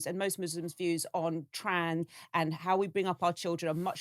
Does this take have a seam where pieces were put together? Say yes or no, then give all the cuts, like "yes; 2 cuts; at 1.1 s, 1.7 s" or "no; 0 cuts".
yes; 1 cut; at 2.1 s